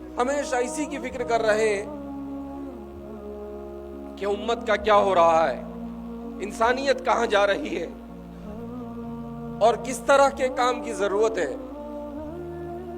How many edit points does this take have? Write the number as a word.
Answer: three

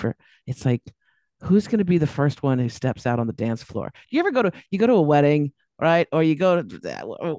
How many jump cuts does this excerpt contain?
zero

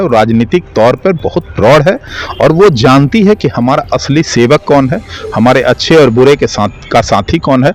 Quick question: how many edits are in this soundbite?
zero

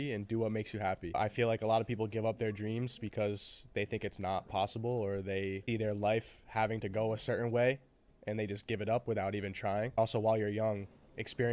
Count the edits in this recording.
three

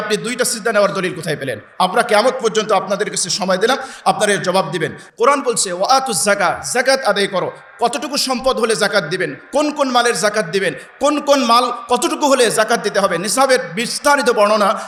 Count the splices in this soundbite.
zero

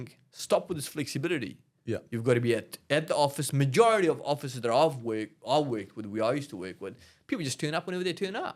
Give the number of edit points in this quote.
zero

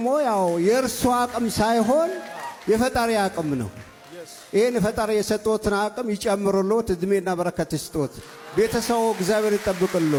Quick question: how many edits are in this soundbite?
zero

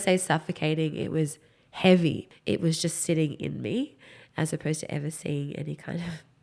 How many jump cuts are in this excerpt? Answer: one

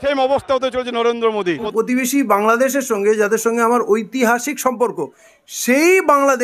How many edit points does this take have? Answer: one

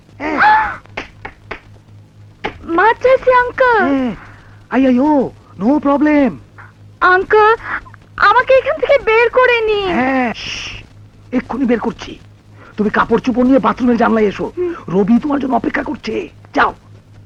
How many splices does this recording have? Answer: zero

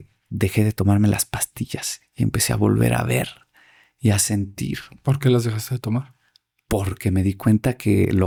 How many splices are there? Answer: zero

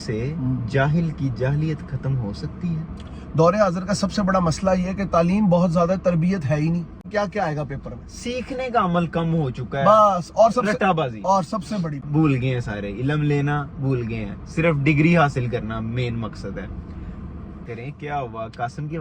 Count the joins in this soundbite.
three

